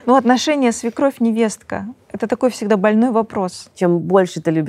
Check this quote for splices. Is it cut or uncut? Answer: cut